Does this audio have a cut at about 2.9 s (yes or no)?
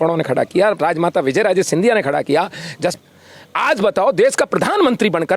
yes